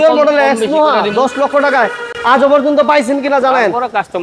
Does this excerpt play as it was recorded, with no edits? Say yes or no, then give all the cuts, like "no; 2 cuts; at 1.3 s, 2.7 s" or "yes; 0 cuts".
yes; 0 cuts